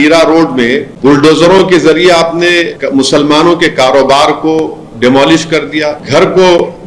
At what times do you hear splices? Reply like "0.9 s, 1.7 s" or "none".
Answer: 0.9 s, 2.8 s, 6.0 s